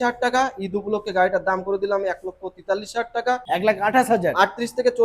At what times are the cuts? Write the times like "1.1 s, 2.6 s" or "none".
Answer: 3.4 s